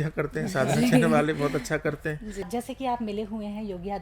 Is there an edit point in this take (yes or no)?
yes